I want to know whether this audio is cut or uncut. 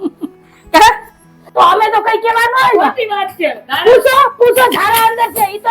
cut